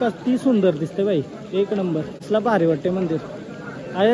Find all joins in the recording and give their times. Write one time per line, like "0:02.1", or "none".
none